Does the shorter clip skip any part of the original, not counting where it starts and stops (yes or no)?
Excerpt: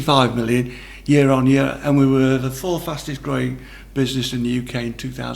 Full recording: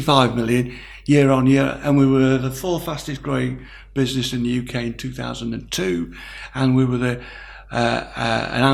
no